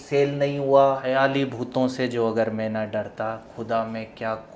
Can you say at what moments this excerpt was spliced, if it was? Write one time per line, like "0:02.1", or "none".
0:01.0

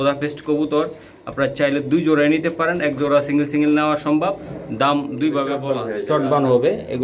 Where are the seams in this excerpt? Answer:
0:05.6

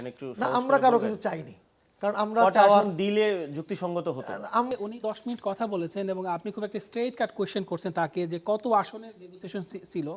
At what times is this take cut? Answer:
0:04.7

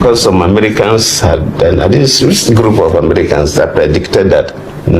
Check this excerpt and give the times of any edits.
0:01.1

